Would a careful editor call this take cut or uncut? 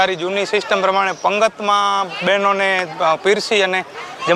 uncut